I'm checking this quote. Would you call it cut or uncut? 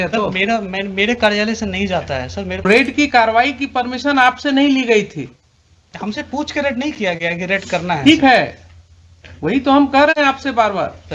cut